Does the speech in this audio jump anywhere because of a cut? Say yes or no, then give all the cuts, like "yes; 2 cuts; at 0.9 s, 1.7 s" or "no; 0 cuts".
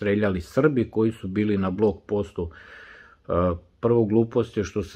no; 0 cuts